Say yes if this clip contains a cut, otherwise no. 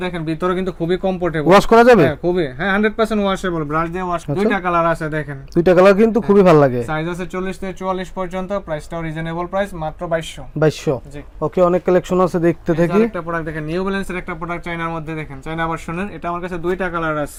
no